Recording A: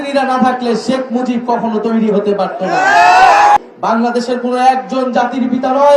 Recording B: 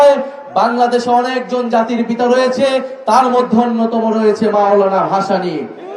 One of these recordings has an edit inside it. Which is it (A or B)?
A